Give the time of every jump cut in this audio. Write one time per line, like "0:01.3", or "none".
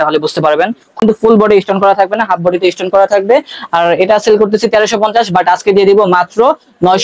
0:01.0

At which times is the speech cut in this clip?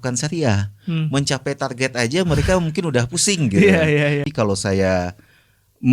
0:04.2

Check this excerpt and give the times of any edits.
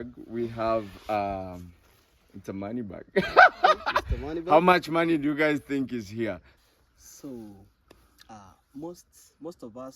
0:06.5

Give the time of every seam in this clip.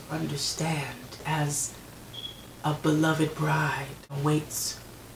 0:01.2
0:04.2

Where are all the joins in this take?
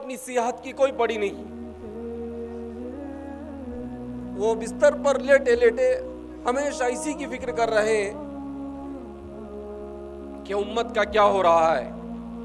none

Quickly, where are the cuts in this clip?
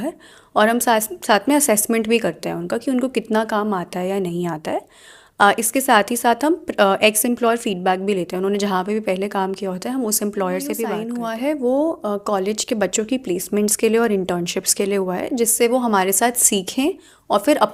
0:11.0

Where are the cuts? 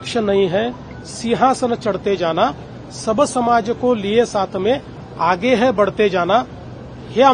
none

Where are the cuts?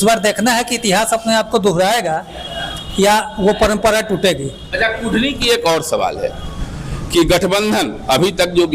none

